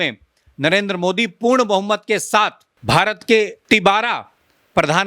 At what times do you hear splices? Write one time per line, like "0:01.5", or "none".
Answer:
0:02.7
0:03.6